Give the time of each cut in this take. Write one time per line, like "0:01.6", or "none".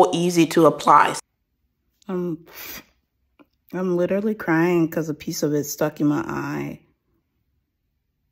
0:01.1
0:07.2